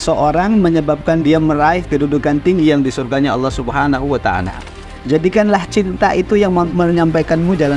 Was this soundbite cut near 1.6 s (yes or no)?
no